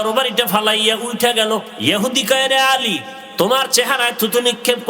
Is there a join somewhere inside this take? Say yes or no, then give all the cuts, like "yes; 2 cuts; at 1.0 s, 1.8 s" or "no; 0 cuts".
yes; 2 cuts; at 1.7 s, 3.1 s